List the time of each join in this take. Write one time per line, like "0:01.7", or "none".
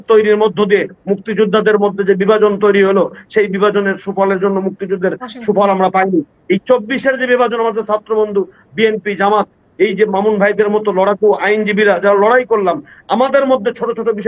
none